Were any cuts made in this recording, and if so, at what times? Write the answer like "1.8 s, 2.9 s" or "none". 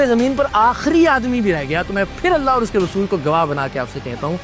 none

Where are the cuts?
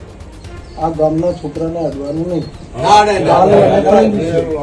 none

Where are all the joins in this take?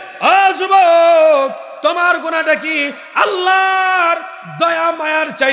none

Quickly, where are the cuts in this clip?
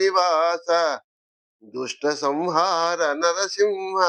0.9 s

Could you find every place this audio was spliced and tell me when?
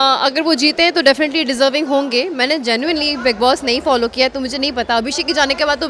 none

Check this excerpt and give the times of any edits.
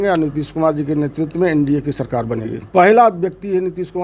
2.5 s

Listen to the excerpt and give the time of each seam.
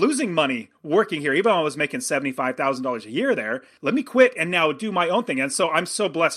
3.7 s

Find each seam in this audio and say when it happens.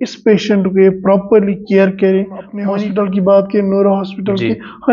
2.6 s

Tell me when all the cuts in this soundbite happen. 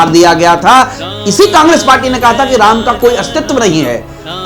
1.0 s

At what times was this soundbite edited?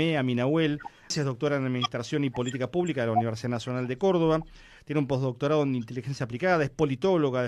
1.1 s

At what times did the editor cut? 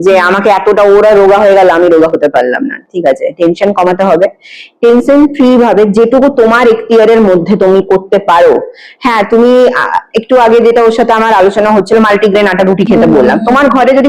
none

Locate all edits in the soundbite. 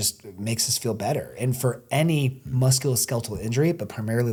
none

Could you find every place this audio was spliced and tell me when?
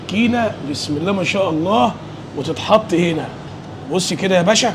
none

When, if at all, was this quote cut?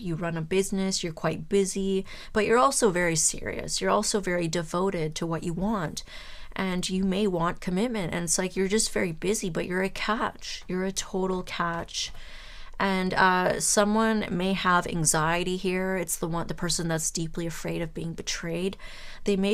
none

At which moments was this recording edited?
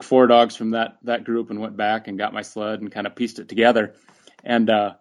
1.0 s

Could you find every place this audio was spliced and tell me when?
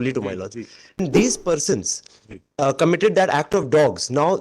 1.0 s

